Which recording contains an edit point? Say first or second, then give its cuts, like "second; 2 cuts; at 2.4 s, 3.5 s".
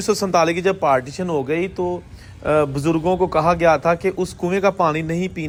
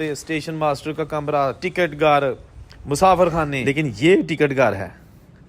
second; 1 cut; at 3.6 s